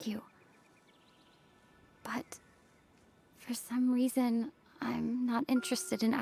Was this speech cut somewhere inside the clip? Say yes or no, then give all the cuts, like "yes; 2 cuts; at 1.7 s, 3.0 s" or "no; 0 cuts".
no; 0 cuts